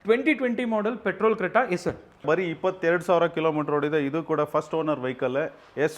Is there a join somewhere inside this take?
yes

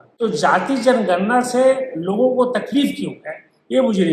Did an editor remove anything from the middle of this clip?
no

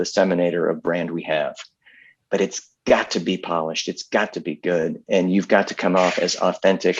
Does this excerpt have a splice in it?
no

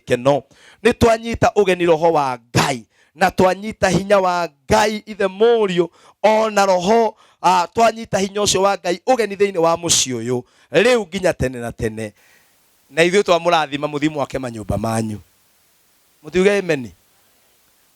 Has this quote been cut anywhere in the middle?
yes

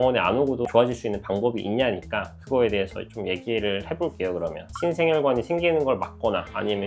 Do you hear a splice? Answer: yes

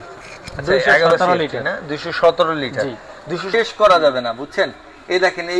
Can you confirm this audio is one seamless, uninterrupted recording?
no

